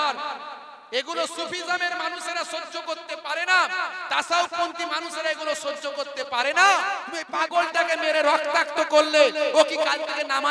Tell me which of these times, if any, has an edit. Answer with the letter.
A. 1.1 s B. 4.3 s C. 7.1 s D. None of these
C